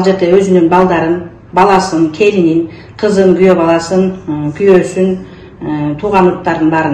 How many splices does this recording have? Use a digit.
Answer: 0